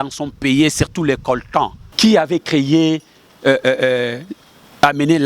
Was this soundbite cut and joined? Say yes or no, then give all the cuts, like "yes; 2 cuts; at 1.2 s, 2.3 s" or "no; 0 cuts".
yes; 1 cut; at 2.0 s